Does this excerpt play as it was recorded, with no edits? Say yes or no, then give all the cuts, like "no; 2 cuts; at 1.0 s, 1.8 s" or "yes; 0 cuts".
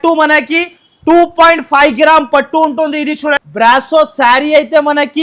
no; 1 cut; at 3.4 s